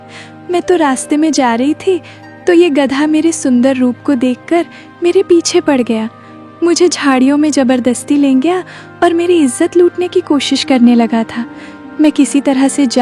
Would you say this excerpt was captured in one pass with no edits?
yes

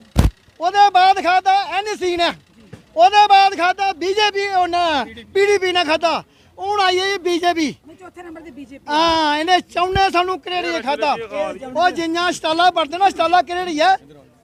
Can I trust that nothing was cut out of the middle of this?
yes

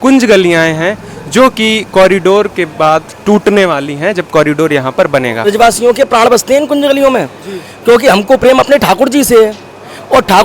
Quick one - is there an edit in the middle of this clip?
yes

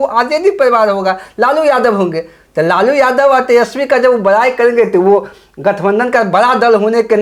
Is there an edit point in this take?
no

